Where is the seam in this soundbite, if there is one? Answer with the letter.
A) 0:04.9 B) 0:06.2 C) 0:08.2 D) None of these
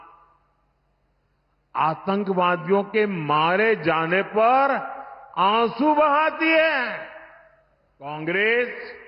C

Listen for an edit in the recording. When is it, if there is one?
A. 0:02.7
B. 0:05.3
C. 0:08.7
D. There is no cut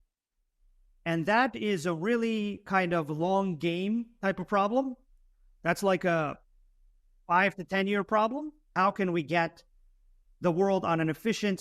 C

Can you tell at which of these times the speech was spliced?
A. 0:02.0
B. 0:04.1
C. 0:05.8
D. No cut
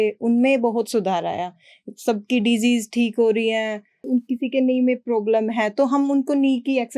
B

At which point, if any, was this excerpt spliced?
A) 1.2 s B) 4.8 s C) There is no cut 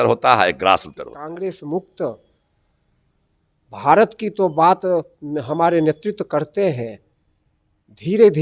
A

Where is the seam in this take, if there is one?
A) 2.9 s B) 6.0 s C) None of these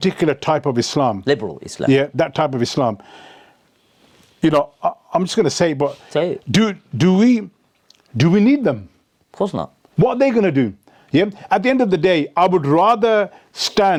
C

